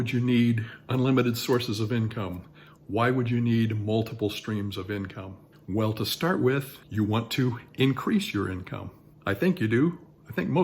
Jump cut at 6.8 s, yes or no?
yes